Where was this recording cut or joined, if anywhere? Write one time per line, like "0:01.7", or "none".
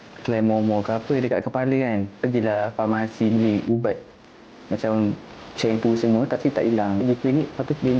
0:02.1
0:07.0